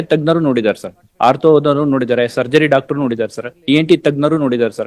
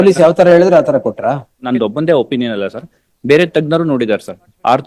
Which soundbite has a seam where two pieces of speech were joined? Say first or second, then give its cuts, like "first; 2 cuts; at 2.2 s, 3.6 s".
second; 1 cut; at 1.6 s